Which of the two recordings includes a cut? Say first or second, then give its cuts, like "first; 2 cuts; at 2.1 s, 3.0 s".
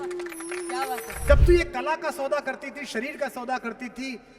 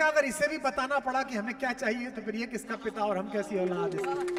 first; 1 cut; at 1.1 s